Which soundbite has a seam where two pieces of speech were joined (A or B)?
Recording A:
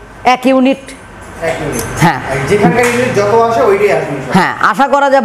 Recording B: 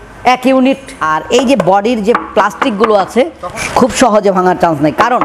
B